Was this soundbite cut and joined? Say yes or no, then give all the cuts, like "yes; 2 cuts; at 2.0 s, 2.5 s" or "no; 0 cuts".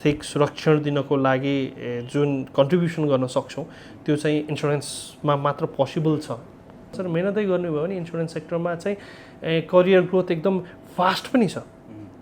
yes; 1 cut; at 7.0 s